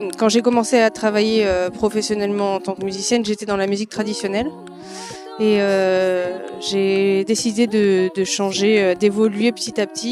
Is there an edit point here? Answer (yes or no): yes